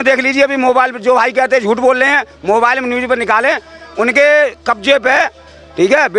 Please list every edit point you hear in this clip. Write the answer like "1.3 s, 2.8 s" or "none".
none

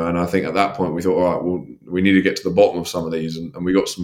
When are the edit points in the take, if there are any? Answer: none

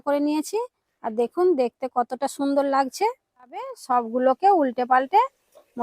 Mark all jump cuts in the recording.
3.8 s

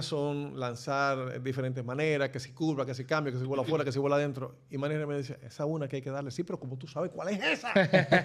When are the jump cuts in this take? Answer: none

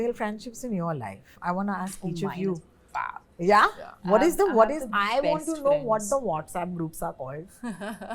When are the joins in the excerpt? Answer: none

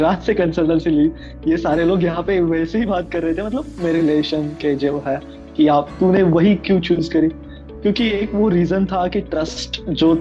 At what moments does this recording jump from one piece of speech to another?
none

